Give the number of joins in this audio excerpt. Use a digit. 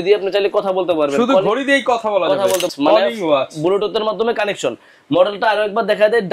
1